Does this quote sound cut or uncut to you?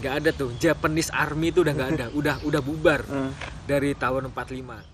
uncut